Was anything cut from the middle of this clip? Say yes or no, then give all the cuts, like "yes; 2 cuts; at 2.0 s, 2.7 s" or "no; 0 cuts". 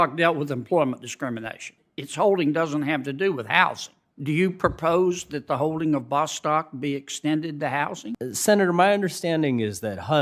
yes; 2 cuts; at 1.8 s, 8.1 s